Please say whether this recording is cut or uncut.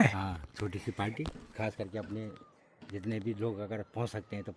uncut